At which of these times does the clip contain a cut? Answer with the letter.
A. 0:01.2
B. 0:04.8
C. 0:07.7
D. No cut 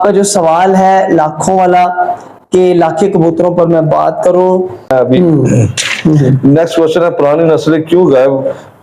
B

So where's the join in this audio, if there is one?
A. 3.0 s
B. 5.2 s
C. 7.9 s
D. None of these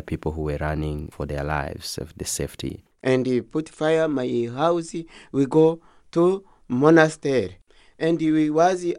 A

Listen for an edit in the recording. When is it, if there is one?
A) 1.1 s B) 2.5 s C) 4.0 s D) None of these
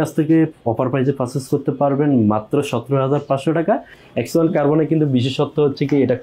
C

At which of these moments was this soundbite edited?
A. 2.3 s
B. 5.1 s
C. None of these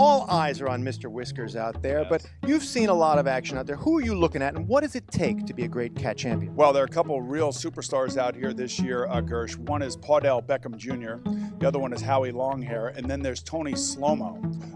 C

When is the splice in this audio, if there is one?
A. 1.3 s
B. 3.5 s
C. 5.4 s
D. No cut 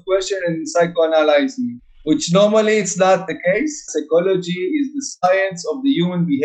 B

